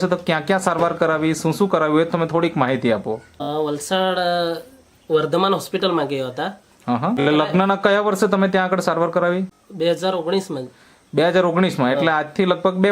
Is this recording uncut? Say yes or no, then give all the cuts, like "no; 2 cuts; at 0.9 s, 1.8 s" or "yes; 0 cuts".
no; 3 cuts; at 3.3 s, 7.2 s, 9.6 s